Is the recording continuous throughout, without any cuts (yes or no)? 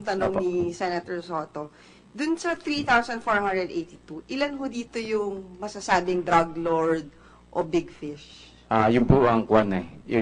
no